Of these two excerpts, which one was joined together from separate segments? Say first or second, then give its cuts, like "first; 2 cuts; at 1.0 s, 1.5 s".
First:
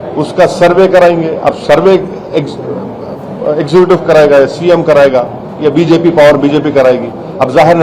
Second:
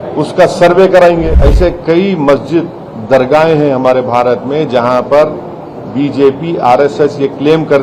second; 1 cut; at 1.3 s